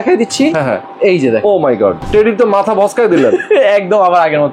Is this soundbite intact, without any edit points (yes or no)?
no